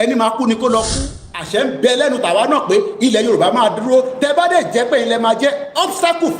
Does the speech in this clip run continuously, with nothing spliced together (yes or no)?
no